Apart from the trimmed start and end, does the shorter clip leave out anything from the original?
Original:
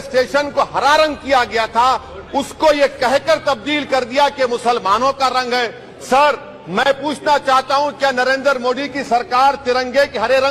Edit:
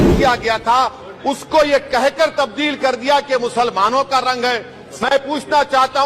yes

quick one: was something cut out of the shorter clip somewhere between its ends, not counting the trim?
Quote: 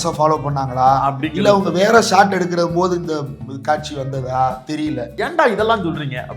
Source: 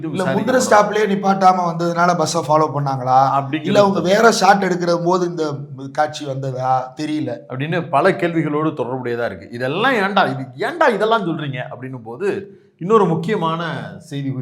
yes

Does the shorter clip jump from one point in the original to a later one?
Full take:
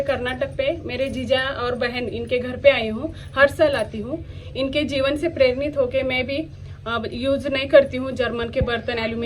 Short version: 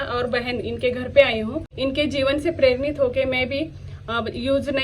yes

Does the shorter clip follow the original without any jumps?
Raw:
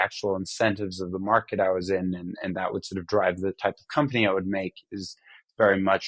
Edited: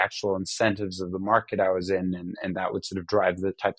yes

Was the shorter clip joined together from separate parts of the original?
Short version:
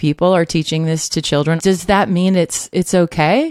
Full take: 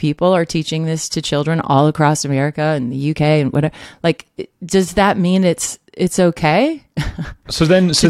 yes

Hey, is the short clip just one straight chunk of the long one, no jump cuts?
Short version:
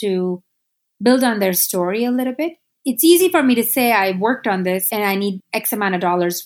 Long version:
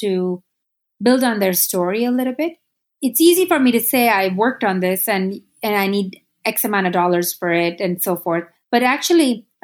no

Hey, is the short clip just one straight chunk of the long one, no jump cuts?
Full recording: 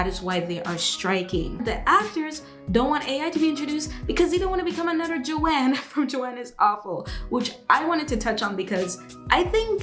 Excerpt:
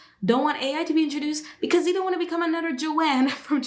yes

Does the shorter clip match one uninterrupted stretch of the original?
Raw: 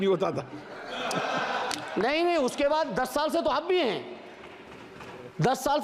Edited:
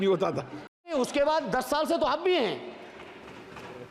no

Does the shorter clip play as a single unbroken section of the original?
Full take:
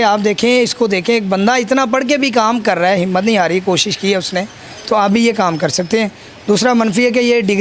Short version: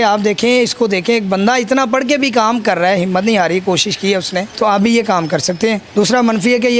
no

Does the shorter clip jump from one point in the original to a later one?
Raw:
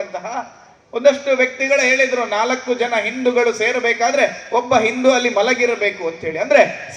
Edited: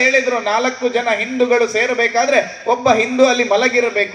no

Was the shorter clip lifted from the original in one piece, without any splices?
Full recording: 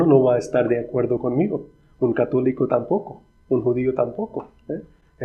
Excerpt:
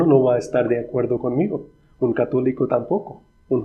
yes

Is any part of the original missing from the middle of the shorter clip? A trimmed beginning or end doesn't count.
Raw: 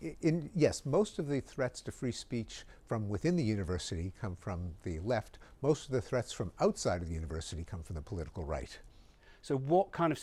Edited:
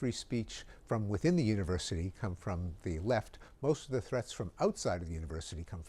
no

